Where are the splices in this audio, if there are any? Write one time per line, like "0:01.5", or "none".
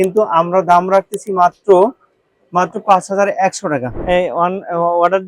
0:03.9